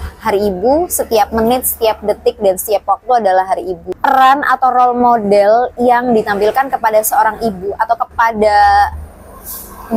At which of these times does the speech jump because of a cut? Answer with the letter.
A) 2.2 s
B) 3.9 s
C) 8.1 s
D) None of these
B